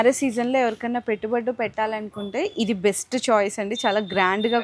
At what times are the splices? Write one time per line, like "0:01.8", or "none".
none